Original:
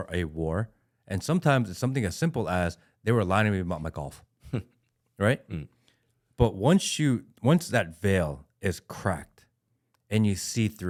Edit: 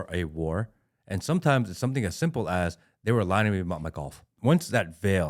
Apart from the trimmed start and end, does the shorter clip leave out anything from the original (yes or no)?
yes